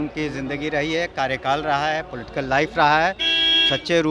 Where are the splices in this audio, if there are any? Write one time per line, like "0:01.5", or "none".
none